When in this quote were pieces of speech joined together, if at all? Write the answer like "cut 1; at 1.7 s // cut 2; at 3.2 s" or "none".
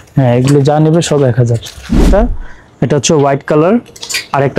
cut 1; at 2.0 s